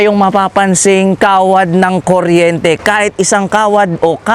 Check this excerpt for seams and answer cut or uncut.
uncut